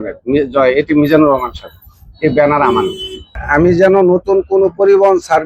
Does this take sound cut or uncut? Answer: cut